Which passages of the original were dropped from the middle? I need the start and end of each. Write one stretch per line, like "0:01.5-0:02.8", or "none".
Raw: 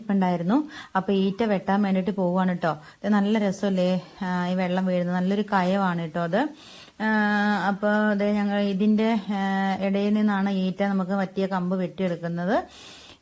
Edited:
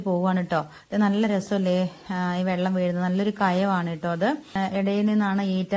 0:06.7-0:09.6